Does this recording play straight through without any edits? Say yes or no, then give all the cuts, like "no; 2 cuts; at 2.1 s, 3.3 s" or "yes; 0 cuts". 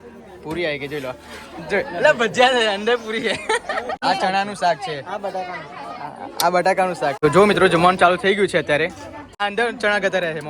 no; 3 cuts; at 4.0 s, 7.2 s, 9.4 s